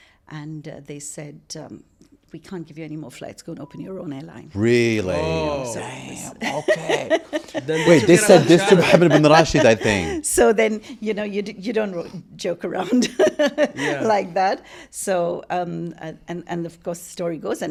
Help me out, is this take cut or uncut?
uncut